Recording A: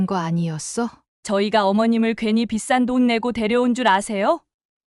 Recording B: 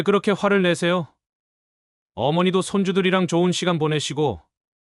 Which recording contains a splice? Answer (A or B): A